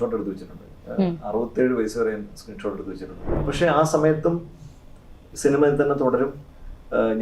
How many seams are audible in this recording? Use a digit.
1